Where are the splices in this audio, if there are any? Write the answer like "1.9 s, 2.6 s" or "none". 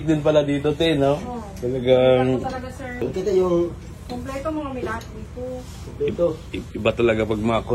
3.1 s